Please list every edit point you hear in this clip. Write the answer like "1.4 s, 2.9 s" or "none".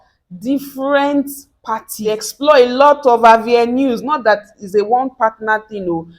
2.0 s